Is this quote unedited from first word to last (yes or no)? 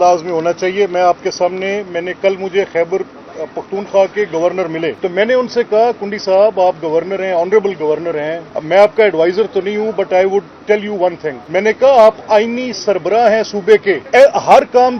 no